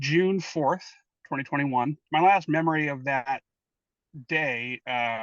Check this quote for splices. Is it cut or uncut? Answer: cut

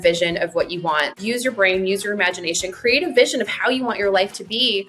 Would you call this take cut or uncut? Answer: cut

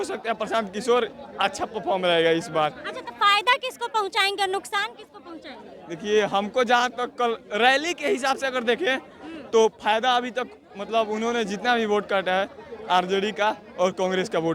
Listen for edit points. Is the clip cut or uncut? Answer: uncut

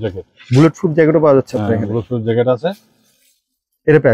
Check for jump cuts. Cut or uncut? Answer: uncut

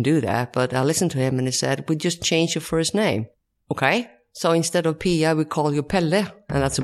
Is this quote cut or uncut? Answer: uncut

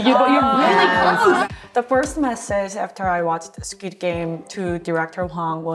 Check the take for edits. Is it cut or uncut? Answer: cut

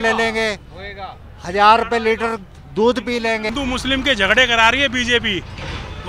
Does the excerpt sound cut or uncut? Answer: cut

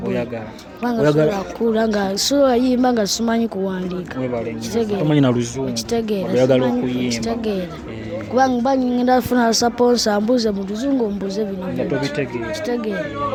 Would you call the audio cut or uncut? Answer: uncut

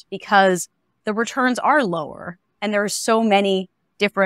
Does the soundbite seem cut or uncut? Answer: uncut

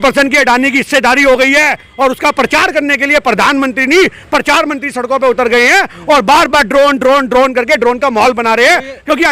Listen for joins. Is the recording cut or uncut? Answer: uncut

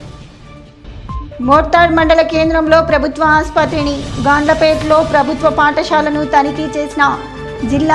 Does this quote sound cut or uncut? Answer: cut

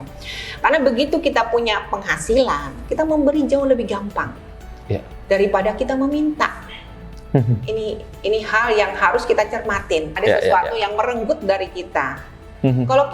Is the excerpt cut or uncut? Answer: cut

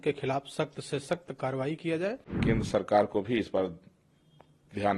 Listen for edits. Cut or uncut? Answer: cut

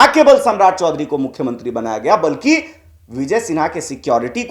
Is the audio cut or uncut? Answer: uncut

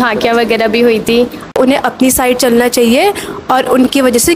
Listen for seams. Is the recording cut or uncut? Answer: cut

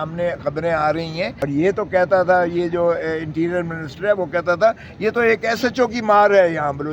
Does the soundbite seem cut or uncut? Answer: cut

